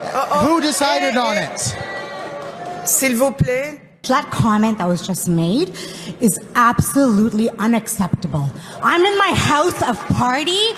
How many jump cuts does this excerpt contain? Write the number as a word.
one